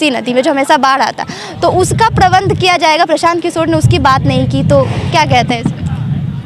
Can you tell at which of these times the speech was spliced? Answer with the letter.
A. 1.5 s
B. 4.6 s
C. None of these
C